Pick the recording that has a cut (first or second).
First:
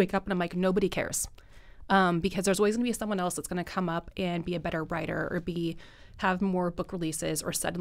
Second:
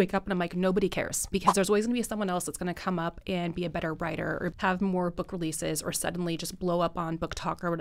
second